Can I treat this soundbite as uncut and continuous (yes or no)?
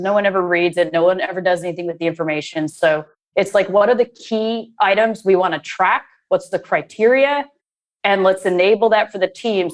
yes